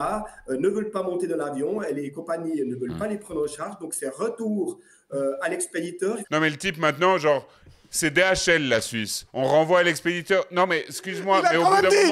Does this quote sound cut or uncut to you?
cut